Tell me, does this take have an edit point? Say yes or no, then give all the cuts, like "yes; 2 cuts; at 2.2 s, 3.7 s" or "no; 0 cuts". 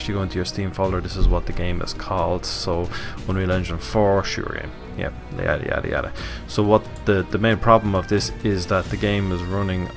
yes; 1 cut; at 3.9 s